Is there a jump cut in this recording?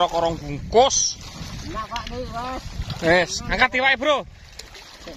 no; 0 cuts

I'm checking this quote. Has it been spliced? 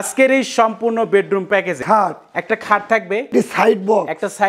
yes; 2 cuts; at 1.8 s, 3.3 s

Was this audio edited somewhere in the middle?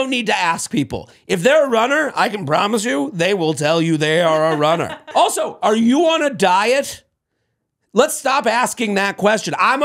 yes; 1 cut; at 5.0 s

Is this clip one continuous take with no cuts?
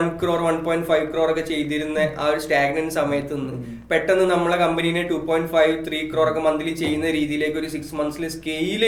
yes; 0 cuts

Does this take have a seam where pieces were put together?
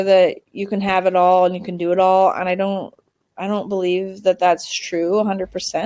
no; 0 cuts

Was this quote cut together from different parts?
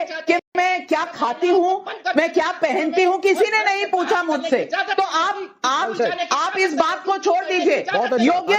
no; 0 cuts

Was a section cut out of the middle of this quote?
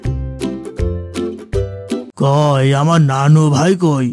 yes; 1 cut; at 2.1 s

